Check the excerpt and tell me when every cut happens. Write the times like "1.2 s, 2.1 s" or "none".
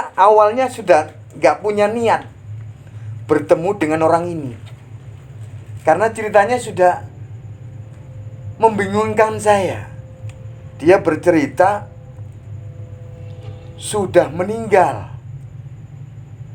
none